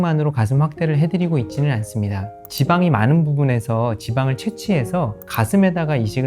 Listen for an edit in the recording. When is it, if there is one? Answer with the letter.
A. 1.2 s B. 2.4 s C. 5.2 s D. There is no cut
B